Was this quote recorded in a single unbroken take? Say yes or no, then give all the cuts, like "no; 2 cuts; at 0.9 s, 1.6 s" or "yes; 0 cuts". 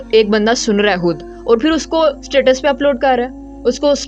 yes; 0 cuts